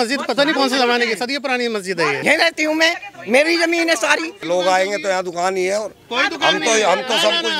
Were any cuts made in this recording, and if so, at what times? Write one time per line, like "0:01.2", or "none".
0:02.2
0:04.4